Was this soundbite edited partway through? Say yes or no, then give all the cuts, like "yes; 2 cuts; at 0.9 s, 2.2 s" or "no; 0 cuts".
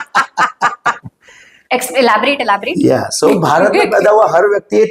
yes; 1 cut; at 1.0 s